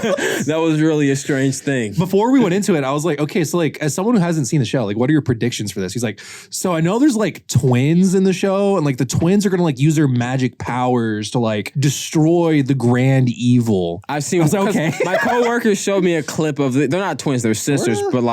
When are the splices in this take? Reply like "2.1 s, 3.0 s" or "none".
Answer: 2.0 s, 11.7 s, 14.0 s